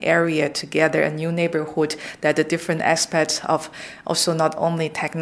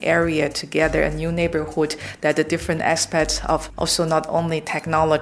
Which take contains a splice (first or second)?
second